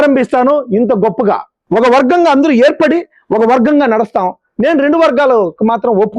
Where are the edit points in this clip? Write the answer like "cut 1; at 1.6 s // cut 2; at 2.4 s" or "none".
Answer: cut 1; at 1.5 s